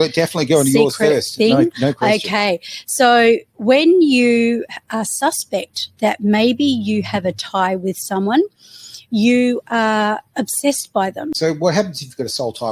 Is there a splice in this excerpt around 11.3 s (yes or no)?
yes